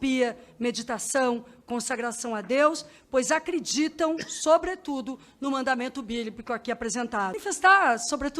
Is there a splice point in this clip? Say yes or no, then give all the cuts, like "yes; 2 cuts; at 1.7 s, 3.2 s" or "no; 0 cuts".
yes; 1 cut; at 7.4 s